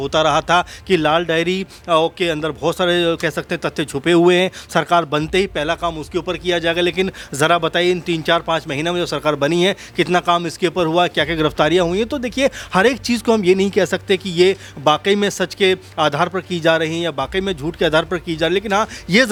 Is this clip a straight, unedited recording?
yes; 0 cuts

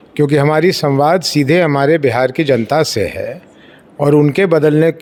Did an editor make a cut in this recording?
no; 0 cuts

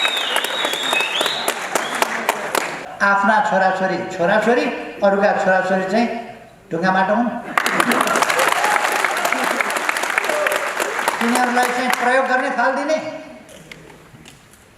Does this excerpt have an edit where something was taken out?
yes; 1 cut; at 2.8 s

